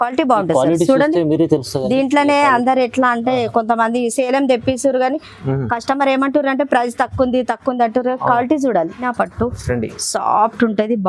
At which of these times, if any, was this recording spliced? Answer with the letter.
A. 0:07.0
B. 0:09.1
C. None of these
B